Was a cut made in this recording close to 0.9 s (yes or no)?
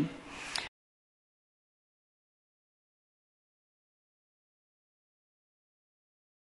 no